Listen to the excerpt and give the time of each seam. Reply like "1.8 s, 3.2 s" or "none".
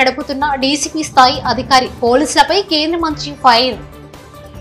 none